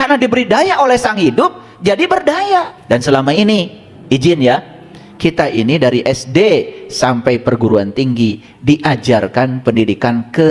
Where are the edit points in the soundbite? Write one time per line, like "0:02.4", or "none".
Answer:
0:02.8